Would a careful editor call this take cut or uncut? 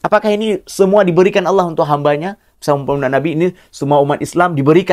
uncut